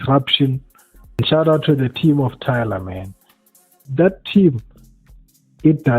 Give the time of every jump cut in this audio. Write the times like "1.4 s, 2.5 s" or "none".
1.2 s, 3.8 s